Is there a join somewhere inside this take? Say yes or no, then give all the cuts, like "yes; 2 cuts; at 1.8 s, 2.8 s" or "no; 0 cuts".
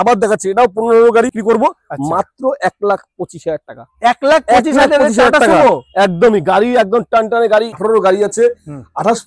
yes; 2 cuts; at 1.3 s, 7.7 s